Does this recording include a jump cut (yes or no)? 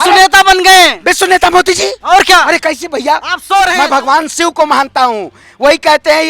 yes